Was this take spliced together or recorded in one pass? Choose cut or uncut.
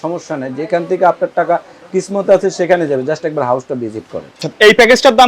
cut